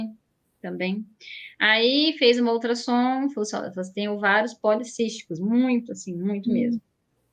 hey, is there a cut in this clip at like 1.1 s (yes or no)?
no